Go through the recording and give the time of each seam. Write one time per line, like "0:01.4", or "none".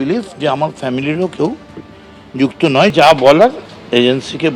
0:02.9